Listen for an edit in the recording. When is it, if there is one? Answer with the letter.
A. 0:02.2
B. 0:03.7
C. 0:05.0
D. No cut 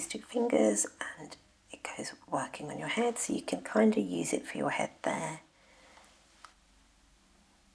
D